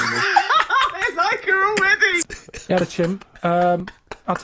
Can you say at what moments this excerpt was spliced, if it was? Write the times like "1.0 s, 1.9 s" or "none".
2.3 s

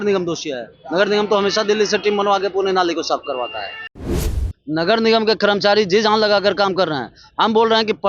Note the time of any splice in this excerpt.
4.2 s

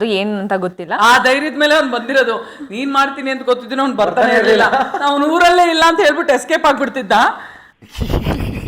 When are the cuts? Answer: 7.7 s

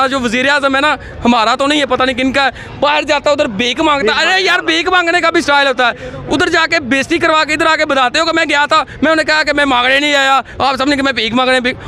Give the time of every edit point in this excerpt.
none

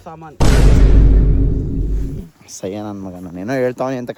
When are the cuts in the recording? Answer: none

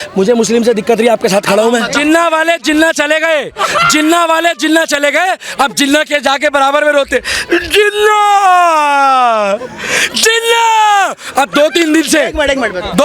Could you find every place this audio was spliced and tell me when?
2.0 s

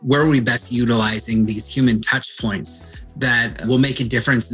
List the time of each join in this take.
3.2 s

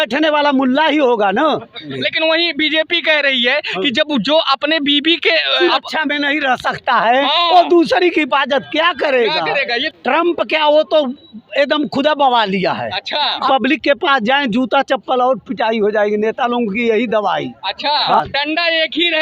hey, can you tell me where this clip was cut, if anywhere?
1.9 s, 5.6 s, 9.8 s, 13.5 s, 18.2 s

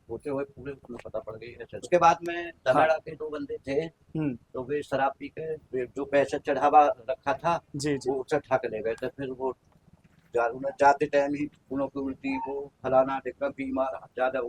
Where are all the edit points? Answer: 1.9 s

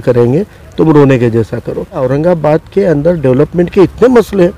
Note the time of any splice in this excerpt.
2.0 s

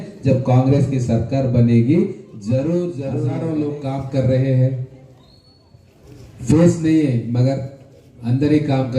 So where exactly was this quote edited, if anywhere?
3.2 s

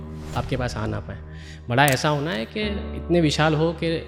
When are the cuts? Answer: none

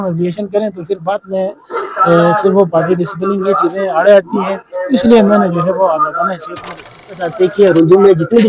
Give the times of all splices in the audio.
7.1 s

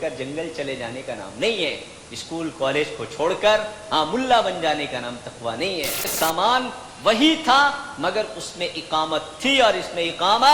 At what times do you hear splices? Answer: 6.1 s

